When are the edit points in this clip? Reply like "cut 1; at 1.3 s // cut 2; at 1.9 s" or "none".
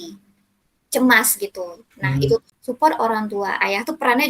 cut 1; at 2.5 s